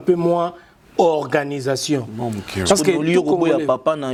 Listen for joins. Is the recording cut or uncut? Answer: uncut